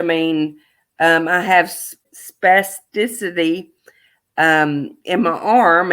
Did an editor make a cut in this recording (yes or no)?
yes